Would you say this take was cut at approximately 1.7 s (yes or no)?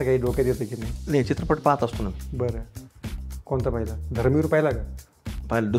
no